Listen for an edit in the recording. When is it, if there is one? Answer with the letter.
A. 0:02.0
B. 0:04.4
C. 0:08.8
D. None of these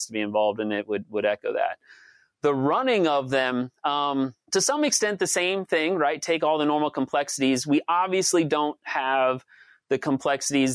B